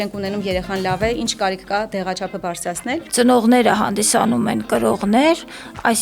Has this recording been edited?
yes; 1 cut; at 3.0 s

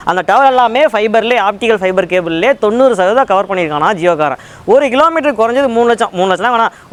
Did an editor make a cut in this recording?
no; 0 cuts

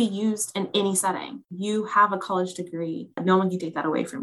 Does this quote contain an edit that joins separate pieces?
yes; 2 cuts; at 1.4 s, 3.2 s

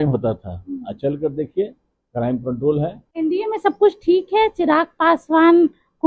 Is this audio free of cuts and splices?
no; 1 cut; at 3.0 s

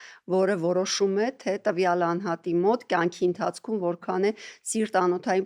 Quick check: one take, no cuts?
yes; 0 cuts

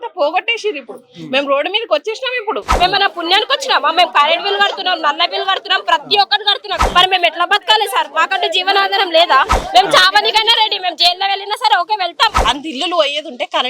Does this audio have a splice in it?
yes; 4 cuts; at 2.7 s, 6.8 s, 9.5 s, 12.4 s

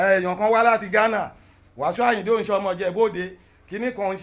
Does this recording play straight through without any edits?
yes; 0 cuts

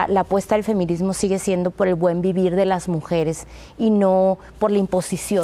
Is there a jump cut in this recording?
no; 0 cuts

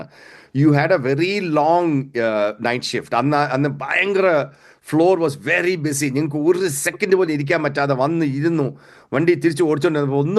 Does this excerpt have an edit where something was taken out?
no; 0 cuts

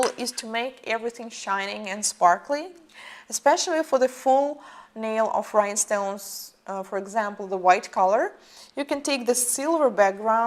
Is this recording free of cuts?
no; 1 cut; at 4.5 s

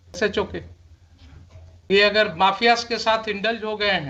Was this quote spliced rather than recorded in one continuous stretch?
yes; 1 cut; at 1.9 s

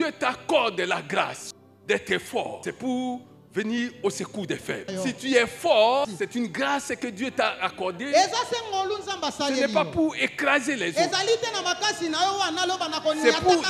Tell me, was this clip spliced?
yes; 4 cuts; at 1.4 s, 2.6 s, 4.9 s, 6.0 s

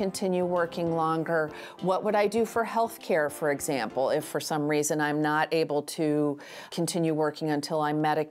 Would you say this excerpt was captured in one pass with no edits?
no; 1 cut; at 6.7 s

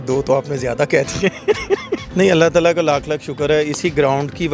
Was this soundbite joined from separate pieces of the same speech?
yes; 1 cut; at 2.0 s

